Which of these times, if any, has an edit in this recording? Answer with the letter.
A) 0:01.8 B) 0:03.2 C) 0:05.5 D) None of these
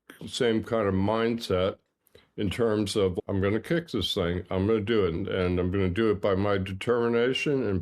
B